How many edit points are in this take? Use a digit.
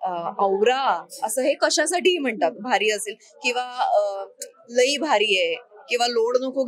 0